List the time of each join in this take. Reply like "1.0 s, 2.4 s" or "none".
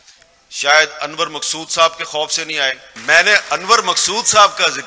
2.9 s